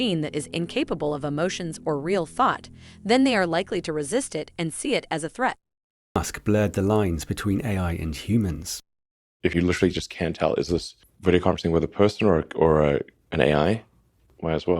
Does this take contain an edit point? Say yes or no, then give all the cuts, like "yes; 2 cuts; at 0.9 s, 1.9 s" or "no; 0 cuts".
yes; 1 cut; at 6.2 s